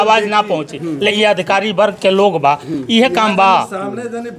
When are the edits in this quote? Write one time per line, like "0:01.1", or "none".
0:01.0